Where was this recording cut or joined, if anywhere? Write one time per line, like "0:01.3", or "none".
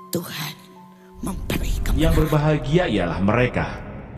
0:01.9

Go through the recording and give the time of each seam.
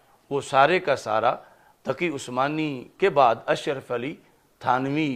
none

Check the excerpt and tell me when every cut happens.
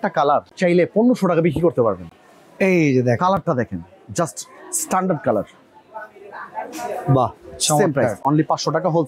none

